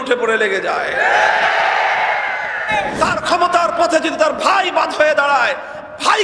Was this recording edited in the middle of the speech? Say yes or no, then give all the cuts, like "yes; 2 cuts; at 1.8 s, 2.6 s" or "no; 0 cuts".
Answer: yes; 1 cut; at 2.7 s